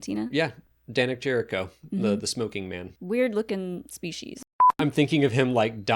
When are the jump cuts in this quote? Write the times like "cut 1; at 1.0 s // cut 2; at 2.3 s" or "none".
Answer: cut 1; at 2.9 s // cut 2; at 4.8 s

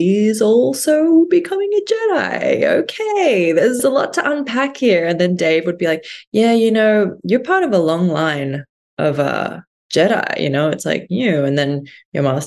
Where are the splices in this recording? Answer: cut 1; at 3.8 s

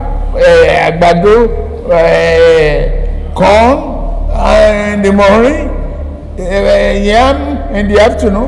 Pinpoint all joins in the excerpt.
none

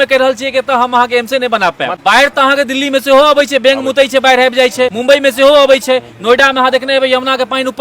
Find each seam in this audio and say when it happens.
cut 1; at 2.0 s // cut 2; at 5.0 s

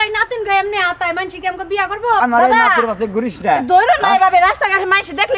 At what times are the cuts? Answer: cut 1; at 2.2 s

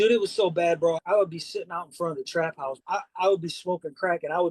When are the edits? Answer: cut 1; at 1.0 s // cut 2; at 2.8 s

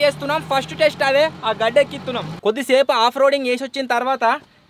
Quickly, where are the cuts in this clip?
cut 1; at 2.4 s

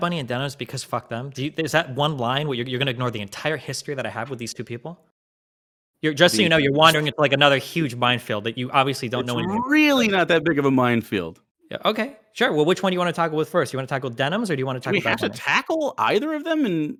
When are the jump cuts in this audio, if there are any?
none

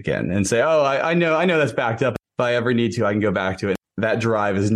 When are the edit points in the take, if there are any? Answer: cut 1; at 2.2 s // cut 2; at 3.8 s

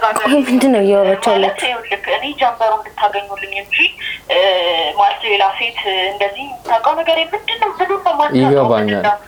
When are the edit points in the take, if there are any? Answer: none

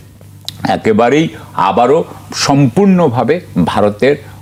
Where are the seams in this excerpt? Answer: none

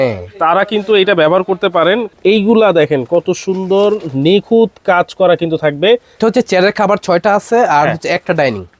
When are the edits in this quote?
cut 1; at 2.1 s // cut 2; at 6.1 s

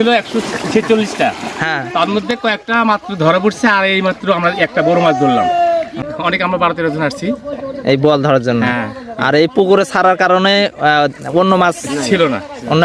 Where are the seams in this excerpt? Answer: cut 1; at 6.0 s

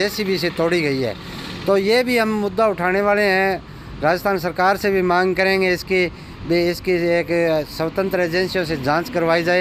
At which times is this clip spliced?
none

